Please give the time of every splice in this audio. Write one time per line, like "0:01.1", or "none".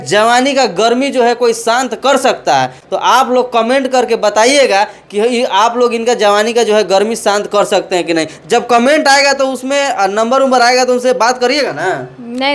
none